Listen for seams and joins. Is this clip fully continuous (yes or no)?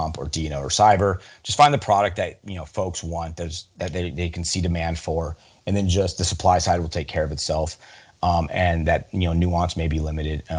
yes